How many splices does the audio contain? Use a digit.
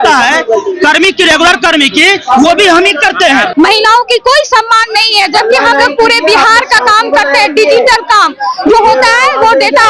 1